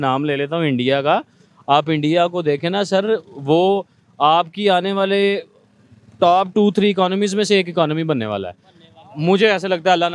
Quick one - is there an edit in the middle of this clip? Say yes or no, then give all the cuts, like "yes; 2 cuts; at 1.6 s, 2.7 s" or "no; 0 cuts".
no; 0 cuts